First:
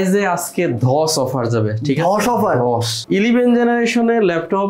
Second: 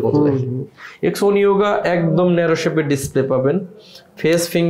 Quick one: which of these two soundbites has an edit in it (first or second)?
first